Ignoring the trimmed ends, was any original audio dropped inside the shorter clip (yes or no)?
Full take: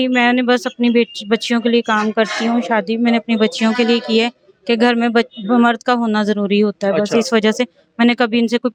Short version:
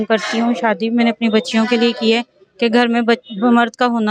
no